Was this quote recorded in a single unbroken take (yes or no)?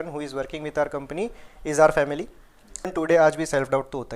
no